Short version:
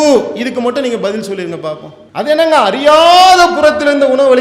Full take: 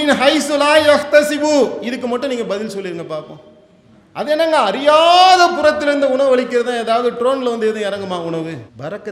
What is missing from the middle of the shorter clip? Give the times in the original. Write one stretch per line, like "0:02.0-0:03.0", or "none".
0:03.4-0:04.0